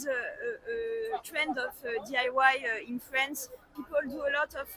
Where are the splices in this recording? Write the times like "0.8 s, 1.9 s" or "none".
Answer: 3.7 s